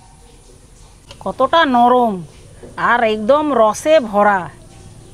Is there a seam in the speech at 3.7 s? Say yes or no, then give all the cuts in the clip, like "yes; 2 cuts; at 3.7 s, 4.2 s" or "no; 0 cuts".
no; 1 cut; at 1.0 s